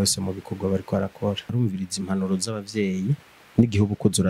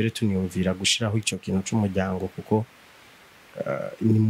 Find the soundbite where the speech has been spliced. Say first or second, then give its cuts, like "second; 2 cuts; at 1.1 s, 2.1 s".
first; 1 cut; at 1.5 s